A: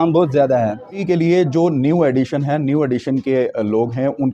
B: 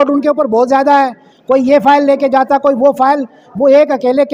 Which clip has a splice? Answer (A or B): A